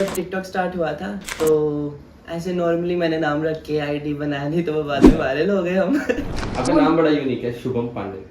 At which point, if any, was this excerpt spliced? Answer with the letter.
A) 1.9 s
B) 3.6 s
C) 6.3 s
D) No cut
C